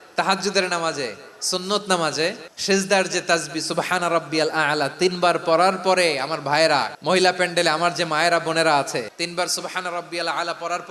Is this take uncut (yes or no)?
no